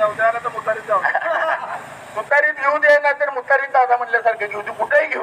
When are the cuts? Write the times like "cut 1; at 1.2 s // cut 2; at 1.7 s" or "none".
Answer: cut 1; at 1.8 s